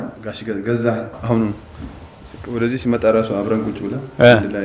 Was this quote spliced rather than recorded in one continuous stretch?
yes; 1 cut; at 1.1 s

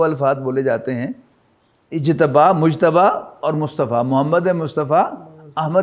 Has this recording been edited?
no; 0 cuts

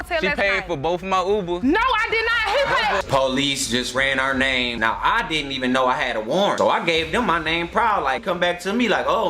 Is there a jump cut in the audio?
yes; 1 cut; at 3.1 s

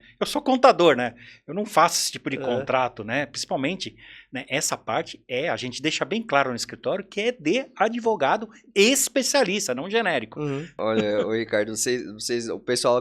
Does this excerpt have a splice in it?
yes; 1 cut; at 10.7 s

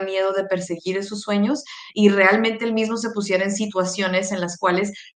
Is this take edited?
no; 0 cuts

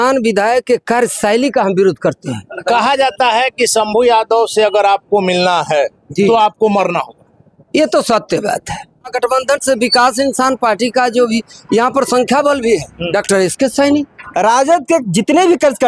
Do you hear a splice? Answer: yes; 4 cuts; at 2.6 s, 9.1 s, 13.0 s, 14.2 s

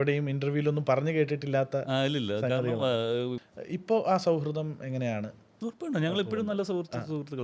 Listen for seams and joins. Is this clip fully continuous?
no; 1 cut; at 3.5 s

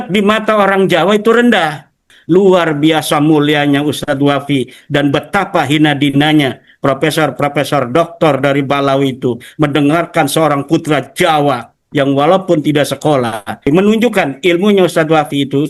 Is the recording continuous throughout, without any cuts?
no; 2 cuts; at 2.1 s, 13.7 s

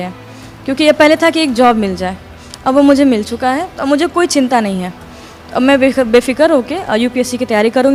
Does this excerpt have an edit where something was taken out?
no; 0 cuts

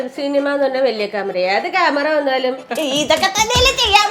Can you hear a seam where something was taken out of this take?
yes; 1 cut; at 2.7 s

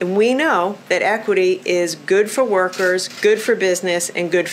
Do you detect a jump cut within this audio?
no; 0 cuts

